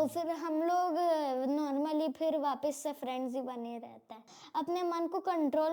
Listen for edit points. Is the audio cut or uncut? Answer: cut